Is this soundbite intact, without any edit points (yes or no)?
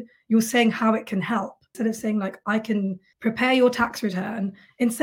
no